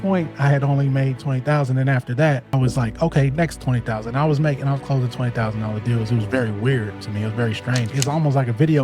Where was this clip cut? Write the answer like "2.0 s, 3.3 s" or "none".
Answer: 2.4 s, 7.9 s